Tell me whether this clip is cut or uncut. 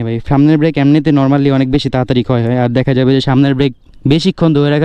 uncut